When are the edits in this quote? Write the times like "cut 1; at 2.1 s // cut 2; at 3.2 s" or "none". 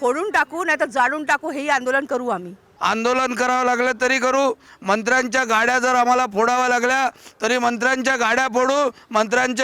cut 1; at 2.7 s